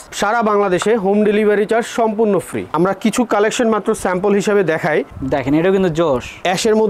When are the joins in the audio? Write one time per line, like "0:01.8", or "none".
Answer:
0:02.7